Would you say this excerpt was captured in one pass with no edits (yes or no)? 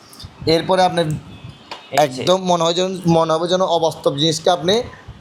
yes